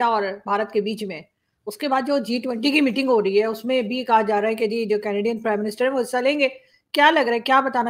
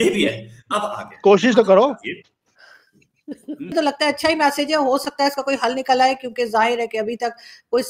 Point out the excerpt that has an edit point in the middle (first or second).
second